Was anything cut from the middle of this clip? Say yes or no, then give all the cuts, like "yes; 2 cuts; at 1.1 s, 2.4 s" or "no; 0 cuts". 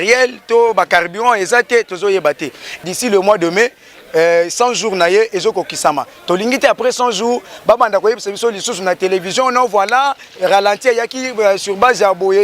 yes; 1 cut; at 2.8 s